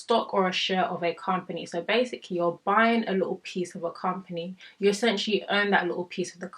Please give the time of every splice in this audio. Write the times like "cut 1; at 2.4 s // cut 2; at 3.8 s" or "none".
none